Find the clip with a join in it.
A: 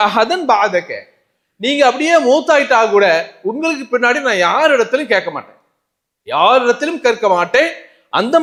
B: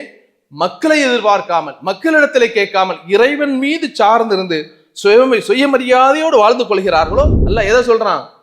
B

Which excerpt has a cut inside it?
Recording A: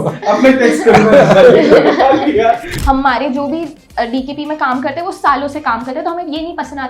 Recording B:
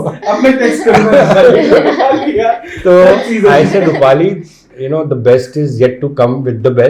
A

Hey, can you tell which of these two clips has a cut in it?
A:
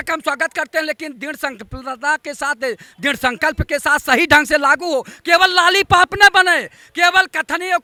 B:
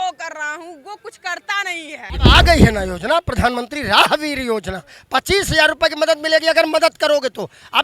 B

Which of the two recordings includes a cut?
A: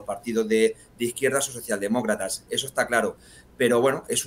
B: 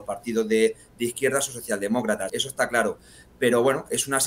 B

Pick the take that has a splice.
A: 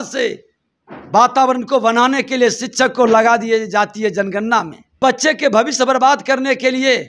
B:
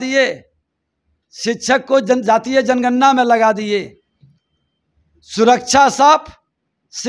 A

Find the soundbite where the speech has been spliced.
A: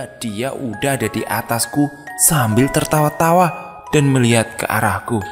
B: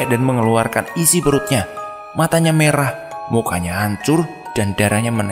B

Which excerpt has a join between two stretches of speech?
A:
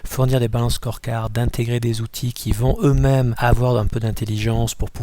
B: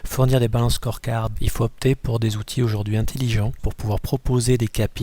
B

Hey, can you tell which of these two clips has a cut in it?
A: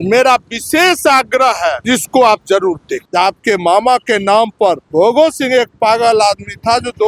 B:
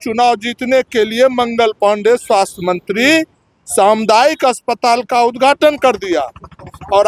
A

